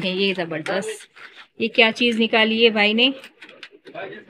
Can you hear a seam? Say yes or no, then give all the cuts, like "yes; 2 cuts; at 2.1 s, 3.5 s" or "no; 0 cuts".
no; 0 cuts